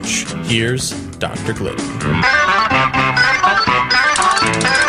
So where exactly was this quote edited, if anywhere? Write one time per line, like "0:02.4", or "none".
none